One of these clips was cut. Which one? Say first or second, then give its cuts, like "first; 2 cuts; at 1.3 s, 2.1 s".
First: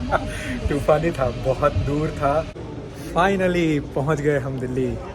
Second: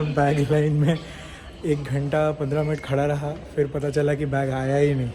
first; 1 cut; at 2.5 s